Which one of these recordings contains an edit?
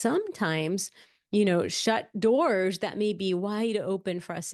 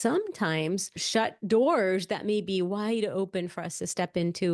second; 1 cut; at 1.0 s

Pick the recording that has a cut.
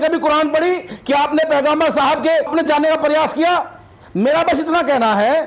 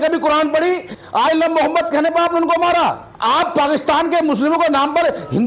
second; 2 cuts; at 0.9 s, 3.1 s

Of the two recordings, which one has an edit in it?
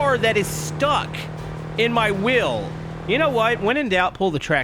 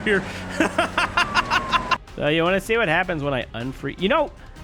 second; 1 cut; at 2.0 s

